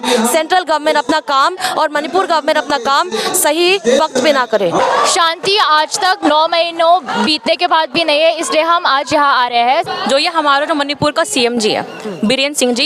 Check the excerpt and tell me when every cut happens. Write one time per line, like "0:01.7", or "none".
0:04.8
0:09.9